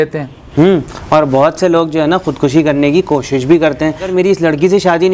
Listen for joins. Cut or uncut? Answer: cut